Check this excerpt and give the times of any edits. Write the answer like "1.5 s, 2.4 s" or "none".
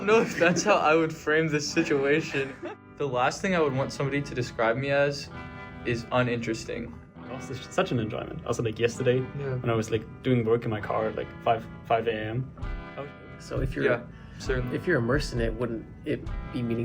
2.5 s, 7.5 s, 12.9 s